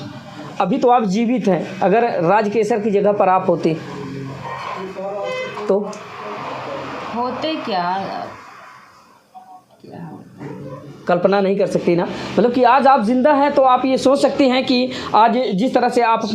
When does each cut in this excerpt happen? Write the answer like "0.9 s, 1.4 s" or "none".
none